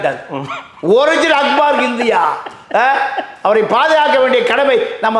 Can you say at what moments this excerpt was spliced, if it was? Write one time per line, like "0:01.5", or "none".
none